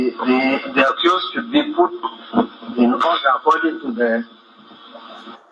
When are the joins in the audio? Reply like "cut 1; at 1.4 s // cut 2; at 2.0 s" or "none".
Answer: none